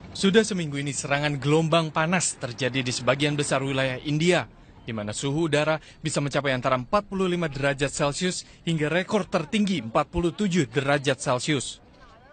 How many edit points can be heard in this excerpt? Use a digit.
1